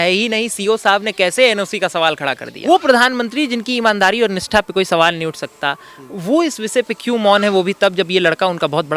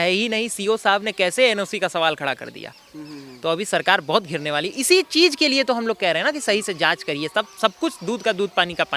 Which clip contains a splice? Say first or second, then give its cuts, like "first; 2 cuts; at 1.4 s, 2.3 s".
first; 1 cut; at 2.6 s